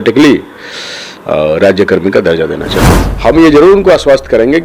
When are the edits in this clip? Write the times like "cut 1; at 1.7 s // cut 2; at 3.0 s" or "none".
cut 1; at 2.6 s